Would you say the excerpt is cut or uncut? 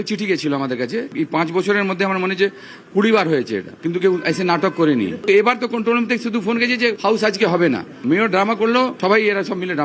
cut